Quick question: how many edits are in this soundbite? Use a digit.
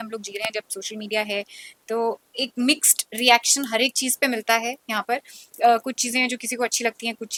0